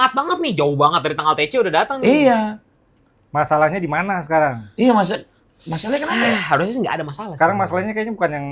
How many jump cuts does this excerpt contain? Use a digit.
0